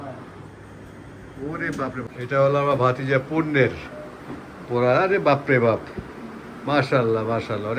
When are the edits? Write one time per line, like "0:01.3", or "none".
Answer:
0:02.1